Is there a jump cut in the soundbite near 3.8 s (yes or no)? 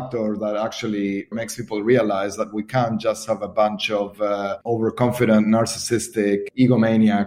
no